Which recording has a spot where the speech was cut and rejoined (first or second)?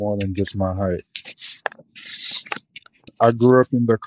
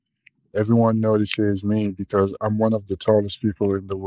first